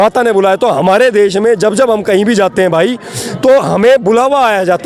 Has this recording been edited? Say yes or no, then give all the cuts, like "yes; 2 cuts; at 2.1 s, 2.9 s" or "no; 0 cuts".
no; 0 cuts